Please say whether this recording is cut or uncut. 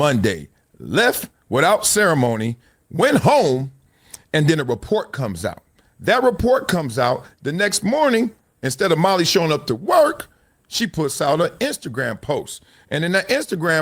uncut